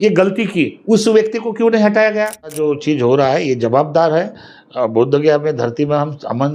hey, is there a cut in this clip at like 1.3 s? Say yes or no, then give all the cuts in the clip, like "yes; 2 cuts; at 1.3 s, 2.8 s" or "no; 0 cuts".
no; 1 cut; at 2.6 s